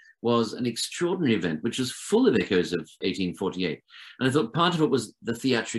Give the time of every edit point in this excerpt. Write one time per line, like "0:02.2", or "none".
0:03.0